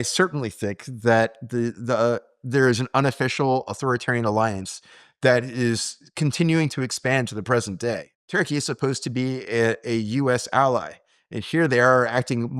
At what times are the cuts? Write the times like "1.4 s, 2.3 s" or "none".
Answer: 8.1 s

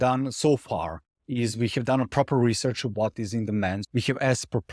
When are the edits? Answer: 3.8 s

